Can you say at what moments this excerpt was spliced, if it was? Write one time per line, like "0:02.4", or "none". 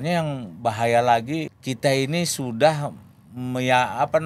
0:01.5